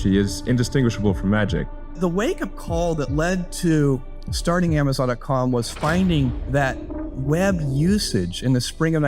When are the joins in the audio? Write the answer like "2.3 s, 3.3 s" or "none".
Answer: 1.9 s